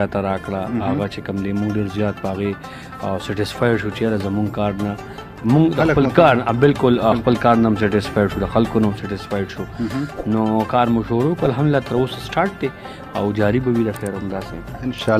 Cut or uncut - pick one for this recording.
uncut